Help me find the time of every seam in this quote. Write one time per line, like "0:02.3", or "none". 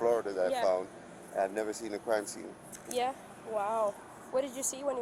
none